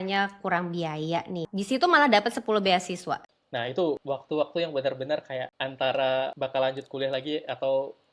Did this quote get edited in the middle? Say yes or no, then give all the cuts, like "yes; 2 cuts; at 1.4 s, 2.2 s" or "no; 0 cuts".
yes; 5 cuts; at 1.5 s, 3.4 s, 4.0 s, 5.6 s, 6.3 s